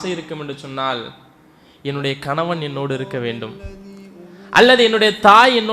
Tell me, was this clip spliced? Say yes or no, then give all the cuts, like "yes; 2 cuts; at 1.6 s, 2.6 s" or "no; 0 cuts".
no; 0 cuts